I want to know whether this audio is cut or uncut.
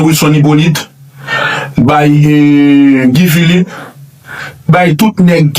uncut